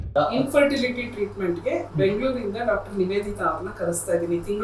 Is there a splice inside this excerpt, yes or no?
no